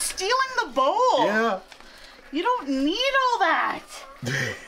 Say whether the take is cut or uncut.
uncut